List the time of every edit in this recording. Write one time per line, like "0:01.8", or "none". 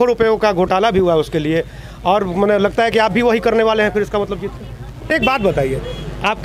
0:05.1